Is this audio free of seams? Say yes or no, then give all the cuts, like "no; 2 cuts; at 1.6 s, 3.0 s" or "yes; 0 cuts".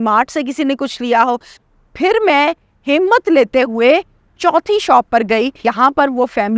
no; 2 cuts; at 1.6 s, 5.7 s